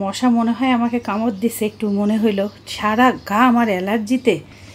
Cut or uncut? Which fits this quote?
uncut